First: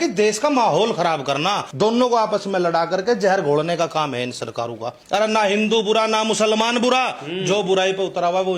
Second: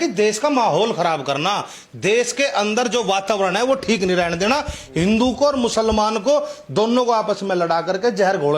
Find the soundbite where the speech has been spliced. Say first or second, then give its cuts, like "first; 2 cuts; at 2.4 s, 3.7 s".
first; 2 cuts; at 1.7 s, 4.9 s